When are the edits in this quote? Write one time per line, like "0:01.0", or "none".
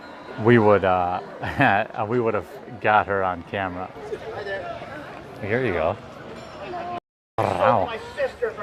0:04.0